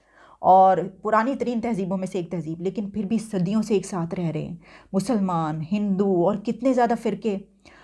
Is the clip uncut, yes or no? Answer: yes